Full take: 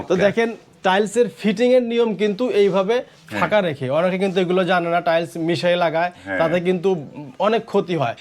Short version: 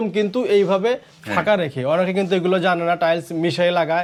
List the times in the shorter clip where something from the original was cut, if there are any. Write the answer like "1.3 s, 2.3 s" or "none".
none